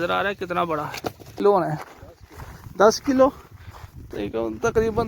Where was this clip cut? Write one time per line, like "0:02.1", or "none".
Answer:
0:01.3